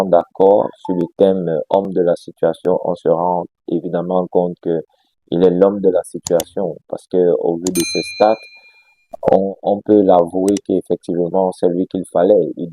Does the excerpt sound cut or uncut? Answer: uncut